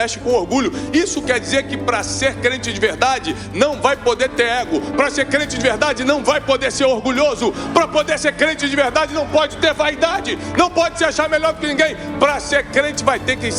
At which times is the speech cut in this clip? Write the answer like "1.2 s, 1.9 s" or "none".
none